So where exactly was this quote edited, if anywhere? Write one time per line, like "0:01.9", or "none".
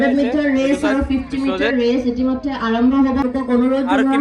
0:03.2